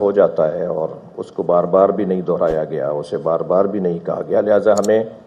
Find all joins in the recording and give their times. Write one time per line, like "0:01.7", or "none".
none